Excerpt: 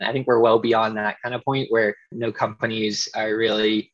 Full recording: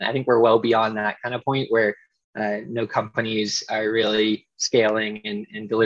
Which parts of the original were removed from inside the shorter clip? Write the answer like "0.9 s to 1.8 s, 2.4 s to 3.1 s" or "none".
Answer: 2.1 s to 2.7 s